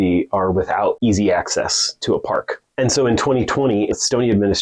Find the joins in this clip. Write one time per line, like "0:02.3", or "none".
0:01.0
0:02.6
0:03.9